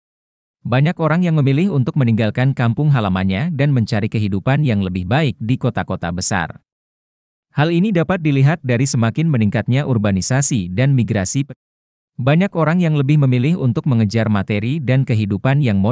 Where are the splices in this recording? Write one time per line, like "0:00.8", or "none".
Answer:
0:11.5